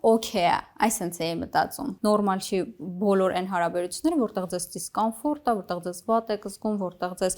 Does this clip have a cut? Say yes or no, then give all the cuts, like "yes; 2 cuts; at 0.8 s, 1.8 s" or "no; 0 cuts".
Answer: yes; 1 cut; at 1.9 s